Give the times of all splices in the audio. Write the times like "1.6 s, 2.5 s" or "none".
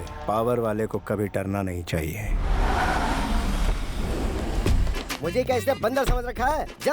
2.3 s